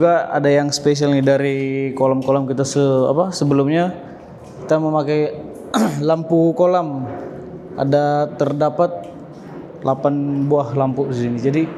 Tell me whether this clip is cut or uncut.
uncut